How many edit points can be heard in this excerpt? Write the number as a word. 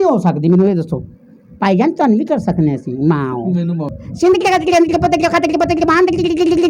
one